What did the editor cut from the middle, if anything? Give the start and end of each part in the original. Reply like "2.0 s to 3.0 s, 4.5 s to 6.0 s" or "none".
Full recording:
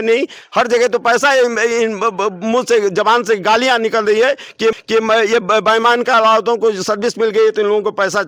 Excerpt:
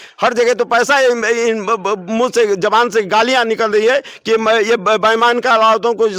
4.6 s to 4.9 s

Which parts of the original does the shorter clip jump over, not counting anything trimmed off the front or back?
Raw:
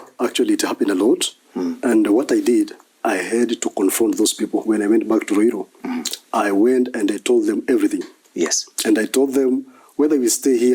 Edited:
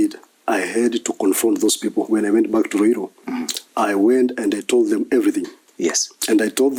none

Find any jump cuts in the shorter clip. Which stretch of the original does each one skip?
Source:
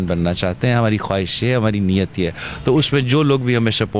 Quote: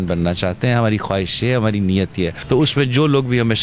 2.4 s to 2.5 s

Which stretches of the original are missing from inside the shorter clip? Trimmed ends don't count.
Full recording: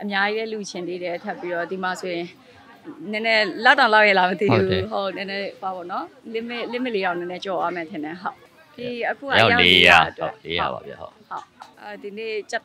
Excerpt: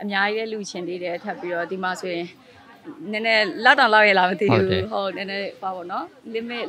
none

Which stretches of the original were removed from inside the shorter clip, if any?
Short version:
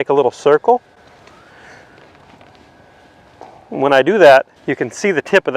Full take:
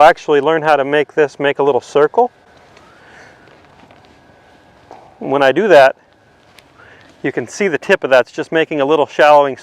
6.1 s to 7.2 s

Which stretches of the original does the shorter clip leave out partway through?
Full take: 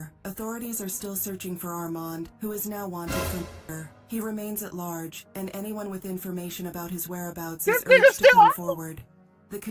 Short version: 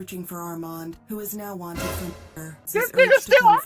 4.0 s to 7.6 s

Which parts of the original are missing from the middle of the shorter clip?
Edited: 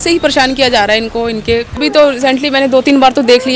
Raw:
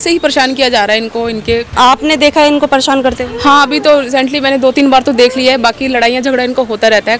1.8 s to 3.7 s

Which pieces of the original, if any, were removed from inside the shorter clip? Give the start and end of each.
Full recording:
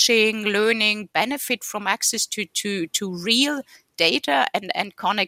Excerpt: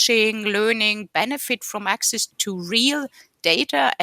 2.4 s to 2.9 s

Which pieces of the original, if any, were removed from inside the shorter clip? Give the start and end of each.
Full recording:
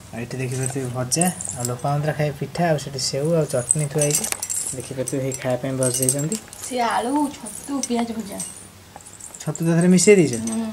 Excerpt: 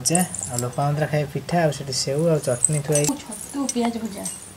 4.2 s to 7.2 s

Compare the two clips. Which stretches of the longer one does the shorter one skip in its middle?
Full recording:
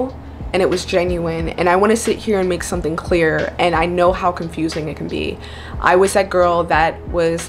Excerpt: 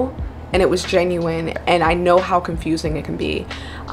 1.5 s to 3.5 s

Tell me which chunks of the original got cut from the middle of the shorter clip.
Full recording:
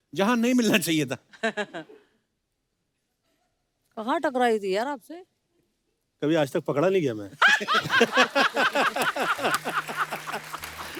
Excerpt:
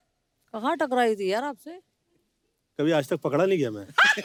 none

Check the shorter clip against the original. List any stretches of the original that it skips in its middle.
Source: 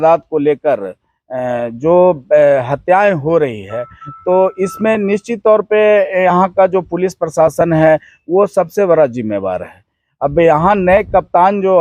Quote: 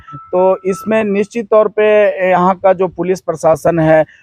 none

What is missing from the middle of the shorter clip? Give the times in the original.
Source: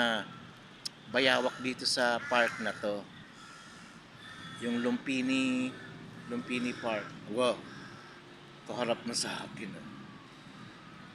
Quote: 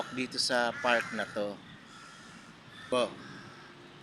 4.4 s to 7.4 s

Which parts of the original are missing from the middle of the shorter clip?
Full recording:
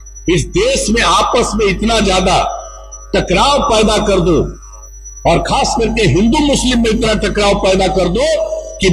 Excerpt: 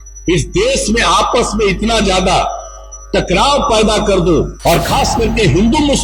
4.5 s to 5.1 s

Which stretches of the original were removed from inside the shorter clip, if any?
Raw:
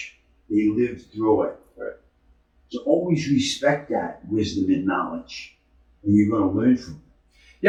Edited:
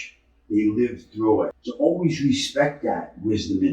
1.6 s to 2.7 s

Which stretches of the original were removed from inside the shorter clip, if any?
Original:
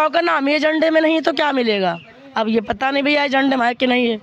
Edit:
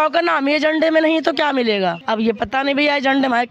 2.0 s to 2.3 s

